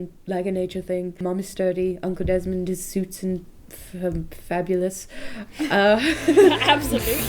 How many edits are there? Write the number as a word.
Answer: one